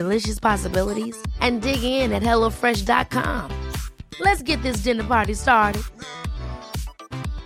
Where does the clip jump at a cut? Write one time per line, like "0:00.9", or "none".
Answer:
none